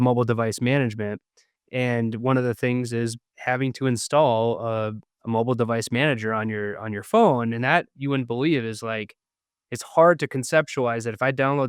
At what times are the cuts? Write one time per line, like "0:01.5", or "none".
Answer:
0:03.3
0:05.1